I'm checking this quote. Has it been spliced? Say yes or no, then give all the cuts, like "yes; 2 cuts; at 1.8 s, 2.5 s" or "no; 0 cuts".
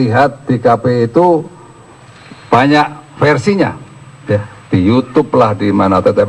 yes; 1 cut; at 3.4 s